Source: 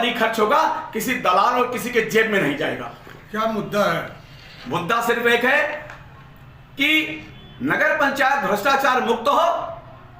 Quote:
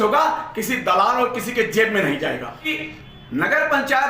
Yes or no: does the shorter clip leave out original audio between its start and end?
yes